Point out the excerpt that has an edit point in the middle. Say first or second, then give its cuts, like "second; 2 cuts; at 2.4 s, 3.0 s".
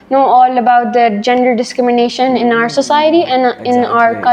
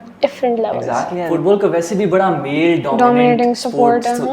second; 1 cut; at 1.2 s